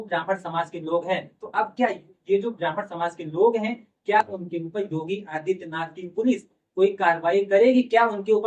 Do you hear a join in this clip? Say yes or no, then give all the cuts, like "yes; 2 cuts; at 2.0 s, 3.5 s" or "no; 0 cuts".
no; 0 cuts